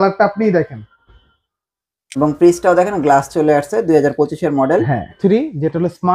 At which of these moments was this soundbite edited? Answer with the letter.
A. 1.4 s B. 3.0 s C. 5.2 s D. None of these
C